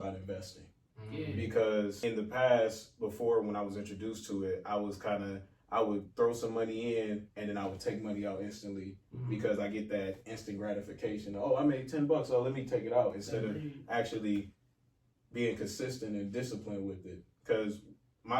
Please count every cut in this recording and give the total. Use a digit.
1